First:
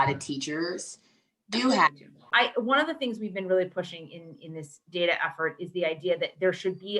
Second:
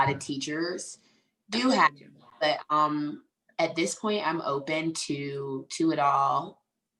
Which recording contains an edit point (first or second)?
first